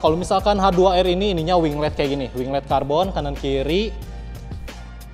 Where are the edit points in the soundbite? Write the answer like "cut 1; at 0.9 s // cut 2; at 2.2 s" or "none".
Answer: none